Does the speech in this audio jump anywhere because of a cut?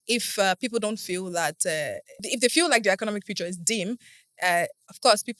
yes; 1 cut; at 2.2 s

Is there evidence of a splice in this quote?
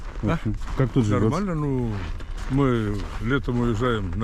no; 0 cuts

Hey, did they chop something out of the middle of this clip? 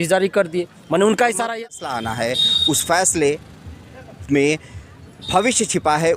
yes; 1 cut; at 1.5 s

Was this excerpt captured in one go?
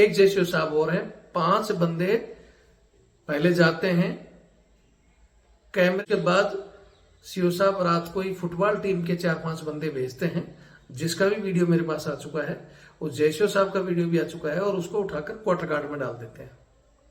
no; 1 cut; at 6.0 s

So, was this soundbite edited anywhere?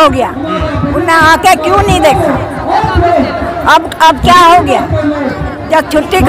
no; 0 cuts

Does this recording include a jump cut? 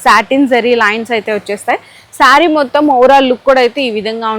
no; 0 cuts

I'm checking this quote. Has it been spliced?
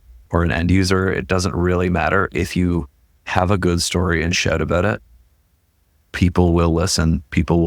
no; 0 cuts

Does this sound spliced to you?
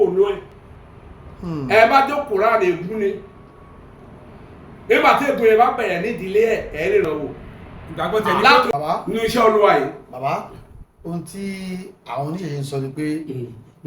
yes; 1 cut; at 8.7 s

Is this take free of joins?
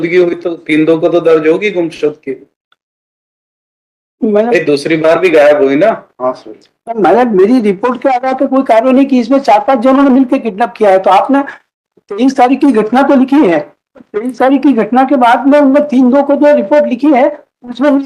yes; 0 cuts

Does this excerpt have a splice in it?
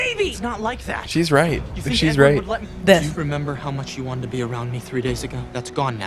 no; 0 cuts

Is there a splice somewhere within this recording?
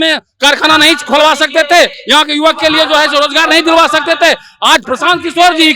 no; 0 cuts

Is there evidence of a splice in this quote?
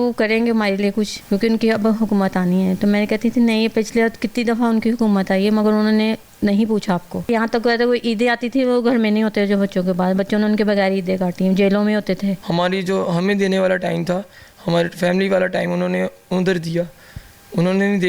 yes; 3 cuts; at 1.2 s, 7.3 s, 12.4 s

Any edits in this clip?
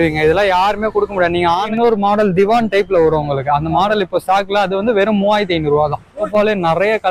yes; 2 cuts; at 1.7 s, 6.3 s

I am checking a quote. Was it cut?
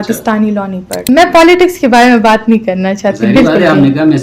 yes; 1 cut; at 1.0 s

